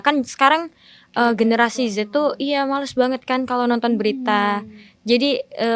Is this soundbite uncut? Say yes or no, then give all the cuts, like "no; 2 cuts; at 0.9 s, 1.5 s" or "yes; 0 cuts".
yes; 0 cuts